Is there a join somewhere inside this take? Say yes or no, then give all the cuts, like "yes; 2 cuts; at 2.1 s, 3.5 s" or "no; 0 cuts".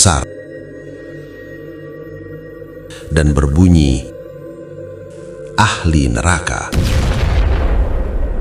no; 0 cuts